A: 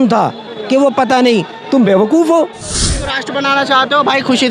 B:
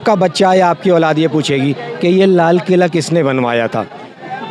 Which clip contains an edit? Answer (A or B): A